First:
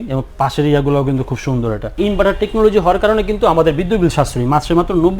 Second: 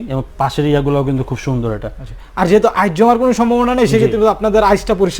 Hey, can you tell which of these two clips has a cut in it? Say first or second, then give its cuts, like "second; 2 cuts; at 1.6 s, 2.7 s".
first; 1 cut; at 2.0 s